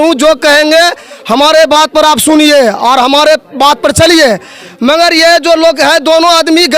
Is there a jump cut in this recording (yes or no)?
no